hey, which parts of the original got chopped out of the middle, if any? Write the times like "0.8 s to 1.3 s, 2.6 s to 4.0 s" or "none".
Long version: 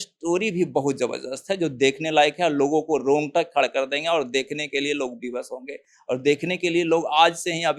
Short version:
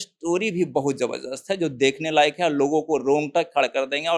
none